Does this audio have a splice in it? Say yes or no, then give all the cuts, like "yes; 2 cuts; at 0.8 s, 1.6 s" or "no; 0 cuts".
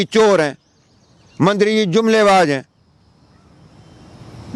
no; 0 cuts